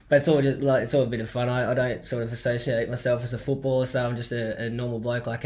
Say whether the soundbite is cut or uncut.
uncut